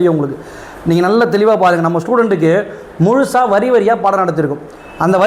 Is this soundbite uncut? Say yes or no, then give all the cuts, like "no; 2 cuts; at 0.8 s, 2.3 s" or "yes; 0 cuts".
yes; 0 cuts